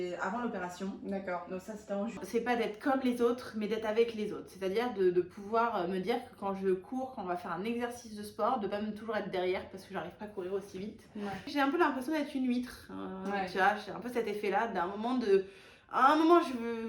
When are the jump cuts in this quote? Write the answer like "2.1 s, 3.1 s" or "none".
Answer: 2.2 s, 11.4 s